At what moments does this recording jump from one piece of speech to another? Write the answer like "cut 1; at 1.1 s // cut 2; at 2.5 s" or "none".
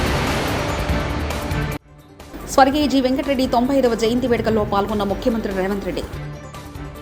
none